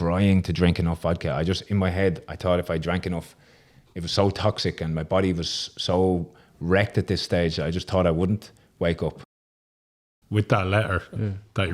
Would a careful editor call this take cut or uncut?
cut